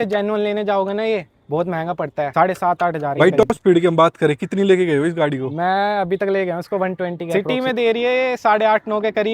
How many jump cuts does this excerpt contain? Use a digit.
3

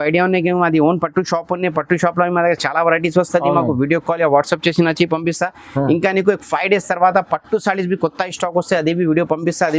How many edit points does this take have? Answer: 0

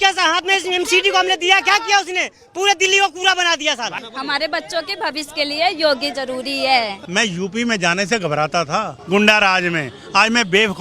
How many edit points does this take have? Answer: 3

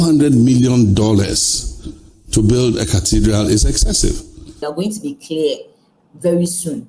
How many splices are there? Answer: 1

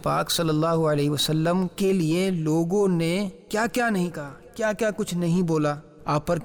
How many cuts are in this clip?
0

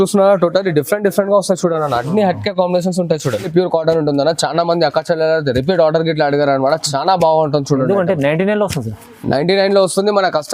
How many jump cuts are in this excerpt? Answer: 1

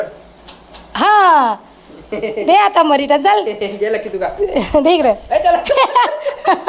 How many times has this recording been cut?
0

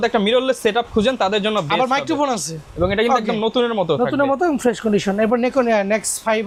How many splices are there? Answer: 0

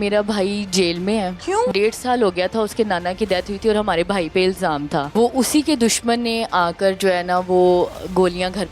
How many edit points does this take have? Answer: 2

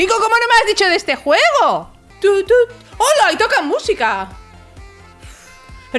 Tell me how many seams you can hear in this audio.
0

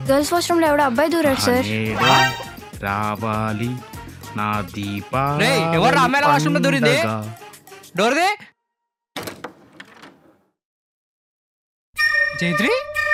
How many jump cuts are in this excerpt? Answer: 0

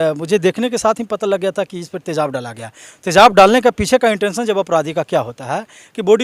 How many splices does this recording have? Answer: 0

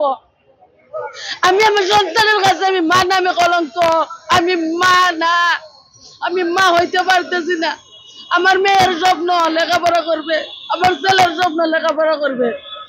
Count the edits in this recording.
0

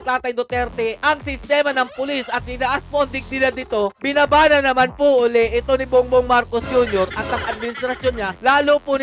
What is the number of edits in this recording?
0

